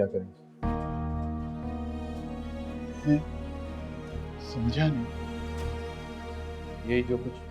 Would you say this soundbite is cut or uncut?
uncut